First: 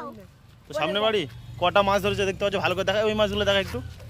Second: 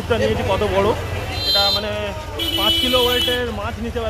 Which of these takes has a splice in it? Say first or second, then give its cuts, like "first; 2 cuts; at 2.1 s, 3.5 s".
second; 1 cut; at 1.4 s